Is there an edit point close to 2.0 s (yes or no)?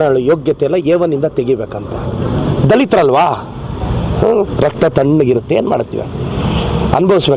yes